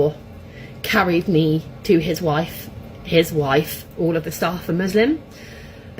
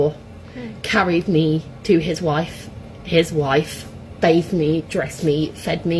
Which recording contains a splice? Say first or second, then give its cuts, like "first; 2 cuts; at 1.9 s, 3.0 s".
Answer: first; 1 cut; at 3.8 s